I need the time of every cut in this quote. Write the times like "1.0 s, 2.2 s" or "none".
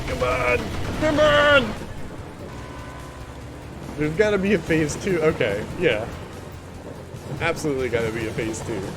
2.5 s

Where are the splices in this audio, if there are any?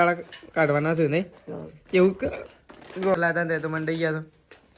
3.1 s

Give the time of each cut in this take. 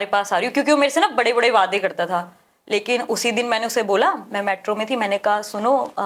none

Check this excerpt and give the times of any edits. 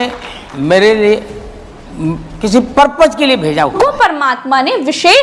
3.8 s

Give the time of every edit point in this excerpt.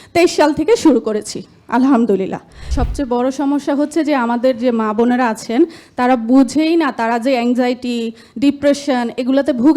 2.6 s

